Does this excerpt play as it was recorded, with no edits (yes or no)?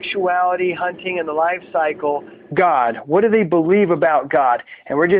yes